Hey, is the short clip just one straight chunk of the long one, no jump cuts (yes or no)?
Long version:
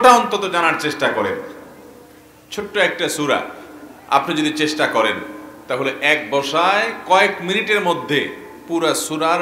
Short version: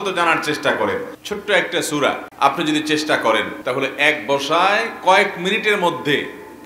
no